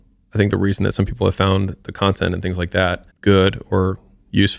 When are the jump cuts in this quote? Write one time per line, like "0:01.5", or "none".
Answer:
0:03.1